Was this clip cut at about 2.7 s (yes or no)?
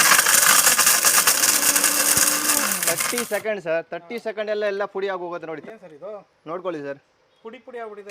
yes